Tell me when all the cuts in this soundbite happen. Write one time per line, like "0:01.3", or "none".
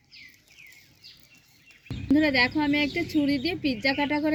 none